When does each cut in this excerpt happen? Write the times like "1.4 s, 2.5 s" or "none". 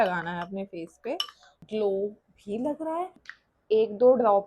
1.5 s, 3.3 s